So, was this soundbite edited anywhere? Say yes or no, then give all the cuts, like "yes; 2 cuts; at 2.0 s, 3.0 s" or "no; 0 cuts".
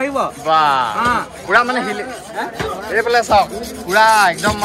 no; 0 cuts